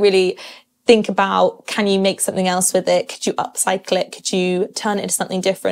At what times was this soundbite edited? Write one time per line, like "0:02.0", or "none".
none